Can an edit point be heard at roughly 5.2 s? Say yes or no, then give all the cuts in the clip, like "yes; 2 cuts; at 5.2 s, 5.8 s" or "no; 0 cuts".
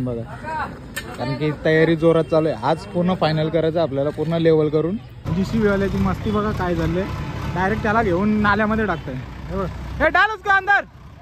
yes; 1 cut; at 5.2 s